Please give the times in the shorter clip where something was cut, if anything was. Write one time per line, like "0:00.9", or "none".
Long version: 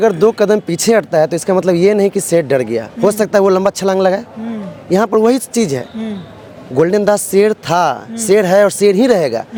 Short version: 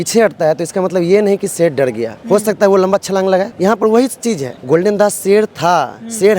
0:03.5
0:04.5